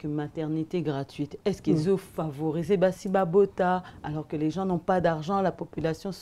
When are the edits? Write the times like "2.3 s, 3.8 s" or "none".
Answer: none